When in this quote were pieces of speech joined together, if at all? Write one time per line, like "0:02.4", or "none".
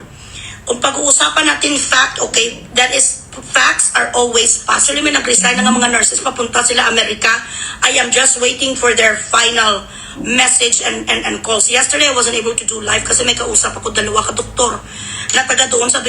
0:05.2